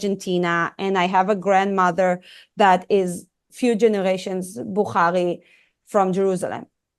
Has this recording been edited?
yes; 1 cut; at 3.4 s

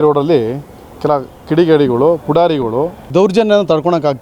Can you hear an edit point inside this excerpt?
yes; 1 cut; at 3.1 s

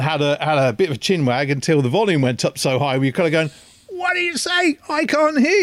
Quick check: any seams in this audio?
no; 0 cuts

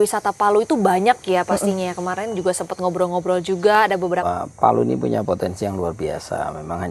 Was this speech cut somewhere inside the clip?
yes; 1 cut; at 4.2 s

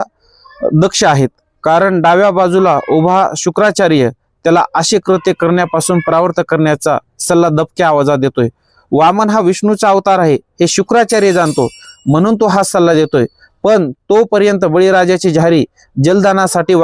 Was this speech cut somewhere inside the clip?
no; 0 cuts

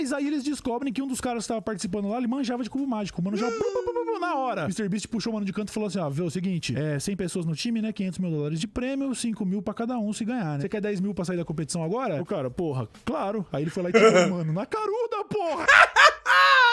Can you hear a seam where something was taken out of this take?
yes; 1 cut; at 15.7 s

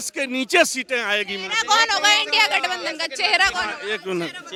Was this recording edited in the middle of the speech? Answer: no; 0 cuts

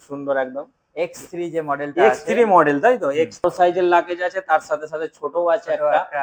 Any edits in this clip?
yes; 1 cut; at 3.4 s

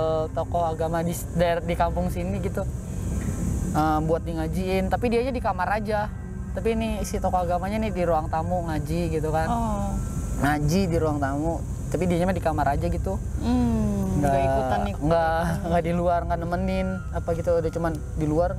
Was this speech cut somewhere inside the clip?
no; 0 cuts

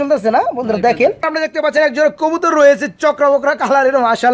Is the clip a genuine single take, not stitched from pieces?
no; 1 cut; at 1.3 s

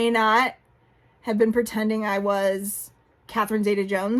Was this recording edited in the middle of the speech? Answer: no; 0 cuts

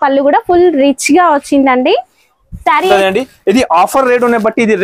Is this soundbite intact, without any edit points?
no; 1 cut; at 2.9 s

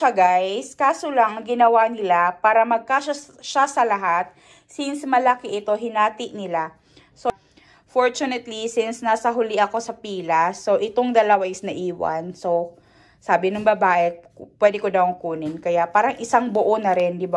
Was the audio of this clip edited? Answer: no; 0 cuts

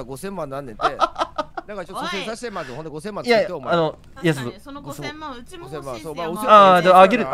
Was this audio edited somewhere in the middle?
no; 0 cuts

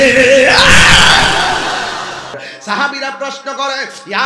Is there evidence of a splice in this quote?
yes; 1 cut; at 2.4 s

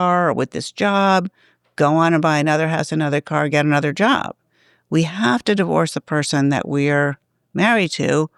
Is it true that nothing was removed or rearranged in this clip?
yes; 0 cuts

